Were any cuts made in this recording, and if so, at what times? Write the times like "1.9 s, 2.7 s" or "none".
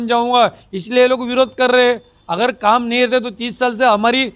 none